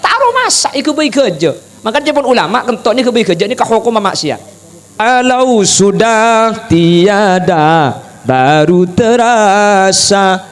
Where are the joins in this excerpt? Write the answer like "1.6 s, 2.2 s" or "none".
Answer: 5.0 s